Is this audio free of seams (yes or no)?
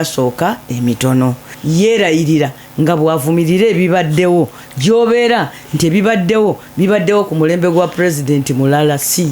no